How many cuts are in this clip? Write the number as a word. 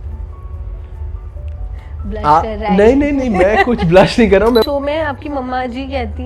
one